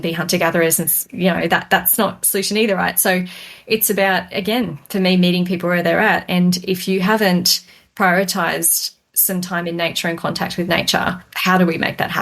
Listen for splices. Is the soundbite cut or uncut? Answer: cut